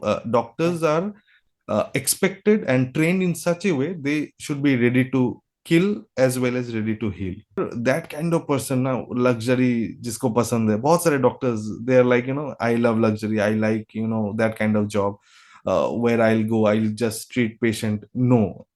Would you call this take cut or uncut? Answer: cut